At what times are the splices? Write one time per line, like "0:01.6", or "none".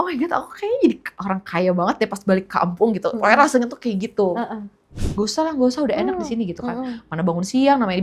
0:05.0